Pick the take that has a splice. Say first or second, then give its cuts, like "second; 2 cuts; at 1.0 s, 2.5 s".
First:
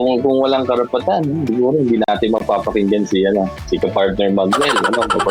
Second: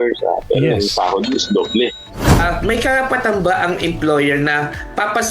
second; 1 cut; at 2.4 s